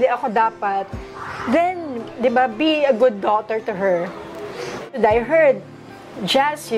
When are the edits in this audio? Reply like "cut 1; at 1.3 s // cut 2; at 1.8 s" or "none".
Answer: cut 1; at 4.8 s

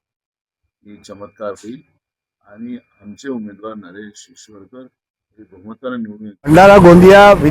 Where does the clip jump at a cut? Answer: cut 1; at 6.5 s

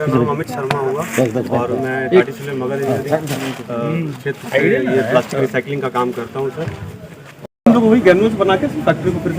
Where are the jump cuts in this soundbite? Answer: cut 1; at 7.7 s

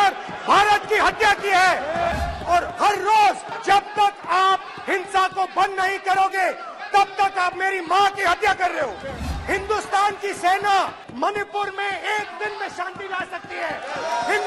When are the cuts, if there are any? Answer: cut 1; at 2.1 s // cut 2; at 3.5 s // cut 3; at 9.2 s // cut 4; at 11.0 s

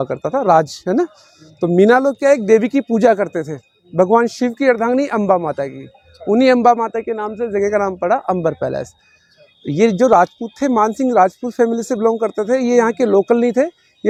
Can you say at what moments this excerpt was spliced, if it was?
none

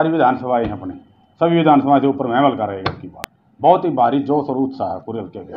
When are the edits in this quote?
none

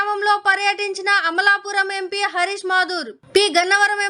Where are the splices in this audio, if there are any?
none

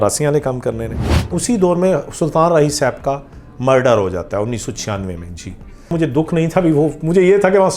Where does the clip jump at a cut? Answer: cut 1; at 1.3 s // cut 2; at 5.9 s

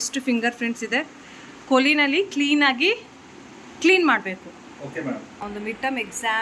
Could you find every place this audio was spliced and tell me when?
cut 1; at 5.5 s

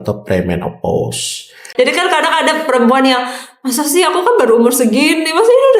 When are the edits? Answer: cut 1; at 1.7 s

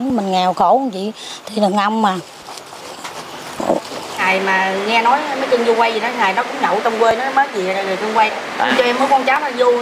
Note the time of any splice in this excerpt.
cut 1; at 4.2 s // cut 2; at 8.7 s

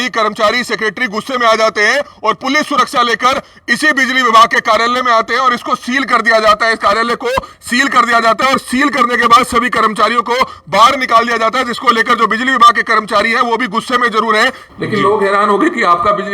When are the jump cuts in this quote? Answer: cut 1; at 14.6 s

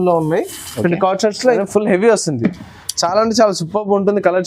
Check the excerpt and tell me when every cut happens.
cut 1; at 1.6 s

